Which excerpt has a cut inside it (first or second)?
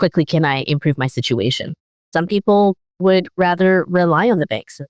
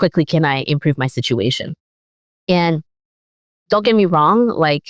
first